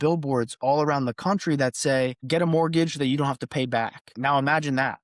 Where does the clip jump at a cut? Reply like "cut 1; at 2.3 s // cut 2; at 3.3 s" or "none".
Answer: cut 1; at 2.2 s // cut 2; at 4.0 s